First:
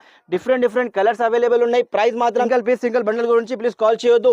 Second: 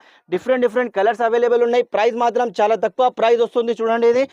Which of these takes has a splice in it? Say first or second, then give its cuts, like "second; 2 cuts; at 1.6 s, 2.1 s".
first; 1 cut; at 2.5 s